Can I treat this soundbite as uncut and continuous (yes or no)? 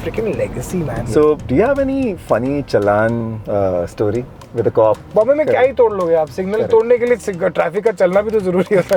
no